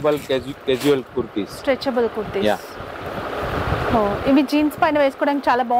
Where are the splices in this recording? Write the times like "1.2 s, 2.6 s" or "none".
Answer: none